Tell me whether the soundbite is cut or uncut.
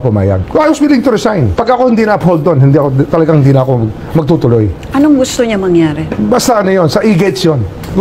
uncut